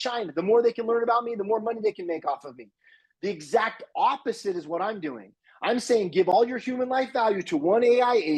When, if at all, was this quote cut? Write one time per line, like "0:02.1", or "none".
none